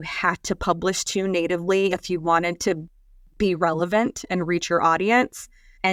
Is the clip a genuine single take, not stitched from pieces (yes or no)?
yes